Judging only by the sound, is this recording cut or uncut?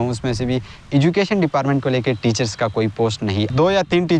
cut